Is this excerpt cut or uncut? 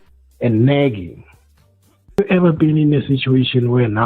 cut